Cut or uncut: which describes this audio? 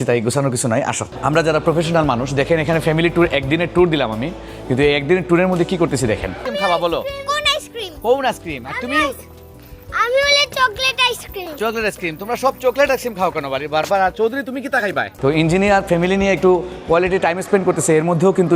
cut